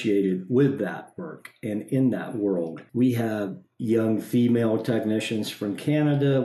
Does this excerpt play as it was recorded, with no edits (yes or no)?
no